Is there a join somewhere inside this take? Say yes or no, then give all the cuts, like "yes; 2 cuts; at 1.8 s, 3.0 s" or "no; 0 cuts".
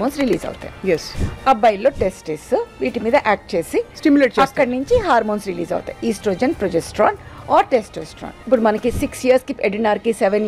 yes; 2 cuts; at 1.2 s, 8.4 s